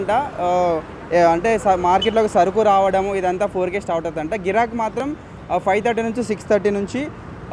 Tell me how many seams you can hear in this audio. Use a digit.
0